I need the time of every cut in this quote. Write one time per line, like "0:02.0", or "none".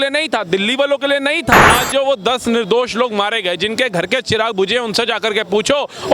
0:01.7